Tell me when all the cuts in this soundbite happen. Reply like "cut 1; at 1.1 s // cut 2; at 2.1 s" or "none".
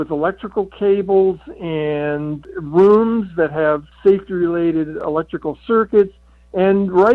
cut 1; at 3.9 s // cut 2; at 5.0 s